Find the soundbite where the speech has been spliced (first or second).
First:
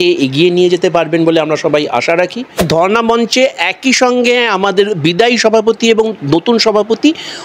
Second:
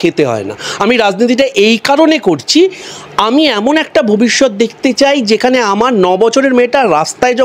first